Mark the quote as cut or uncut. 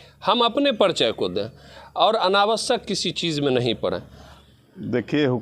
cut